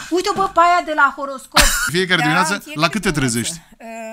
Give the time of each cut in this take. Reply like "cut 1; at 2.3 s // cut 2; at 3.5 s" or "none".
cut 1; at 1.9 s